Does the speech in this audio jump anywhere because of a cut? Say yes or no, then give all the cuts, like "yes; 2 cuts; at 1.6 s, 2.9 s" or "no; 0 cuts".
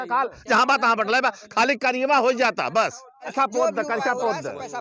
yes; 1 cut; at 3.3 s